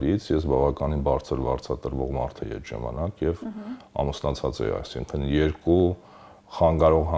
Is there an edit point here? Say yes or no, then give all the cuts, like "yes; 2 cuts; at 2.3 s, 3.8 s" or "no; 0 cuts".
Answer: no; 0 cuts